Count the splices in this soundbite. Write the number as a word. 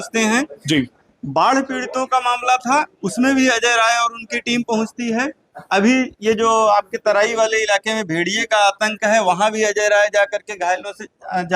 zero